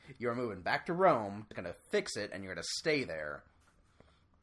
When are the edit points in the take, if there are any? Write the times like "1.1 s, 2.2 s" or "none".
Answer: 1.5 s